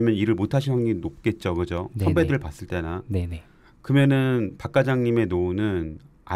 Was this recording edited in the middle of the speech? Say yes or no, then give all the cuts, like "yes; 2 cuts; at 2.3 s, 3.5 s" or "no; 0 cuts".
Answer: no; 0 cuts